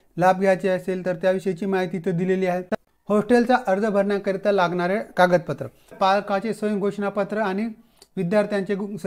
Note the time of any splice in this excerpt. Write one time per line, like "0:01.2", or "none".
0:02.7
0:05.9